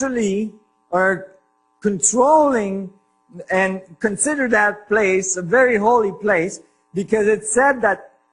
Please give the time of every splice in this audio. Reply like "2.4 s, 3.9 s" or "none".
1.8 s